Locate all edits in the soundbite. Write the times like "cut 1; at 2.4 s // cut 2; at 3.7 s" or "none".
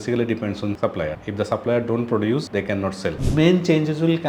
cut 1; at 3.2 s